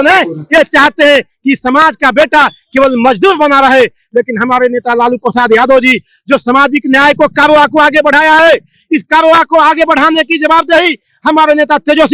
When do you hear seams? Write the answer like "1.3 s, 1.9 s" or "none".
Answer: none

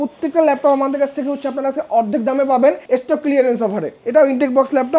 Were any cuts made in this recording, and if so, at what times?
2.8 s, 3.9 s

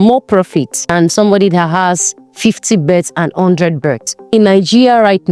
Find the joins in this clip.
0.9 s, 4.3 s

